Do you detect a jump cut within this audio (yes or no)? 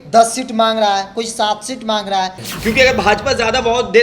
yes